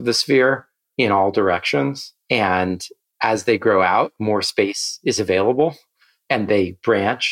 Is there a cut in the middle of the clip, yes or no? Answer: no